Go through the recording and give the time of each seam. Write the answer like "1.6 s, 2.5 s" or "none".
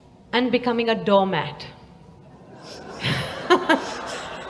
none